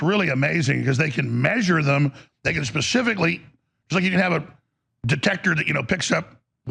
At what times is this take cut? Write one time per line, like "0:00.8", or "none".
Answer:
none